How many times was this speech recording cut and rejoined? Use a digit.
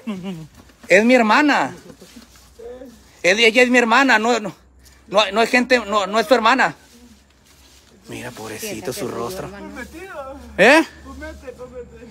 0